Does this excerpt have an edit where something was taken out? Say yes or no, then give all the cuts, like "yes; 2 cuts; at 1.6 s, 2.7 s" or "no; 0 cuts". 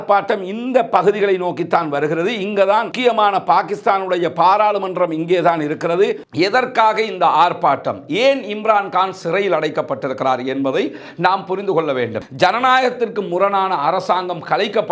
yes; 2 cuts; at 6.2 s, 12.2 s